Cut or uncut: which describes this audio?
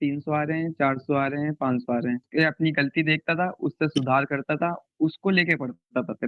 cut